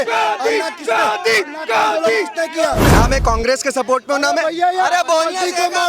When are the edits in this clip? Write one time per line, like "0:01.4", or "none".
0:02.9